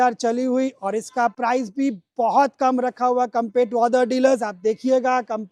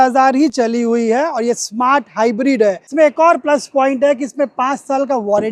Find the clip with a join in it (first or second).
second